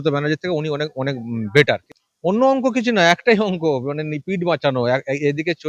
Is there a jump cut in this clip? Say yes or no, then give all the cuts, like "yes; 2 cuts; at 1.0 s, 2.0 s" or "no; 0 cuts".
yes; 1 cut; at 1.7 s